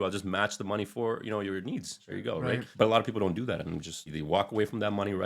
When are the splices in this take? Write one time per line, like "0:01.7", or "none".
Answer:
0:02.4
0:04.2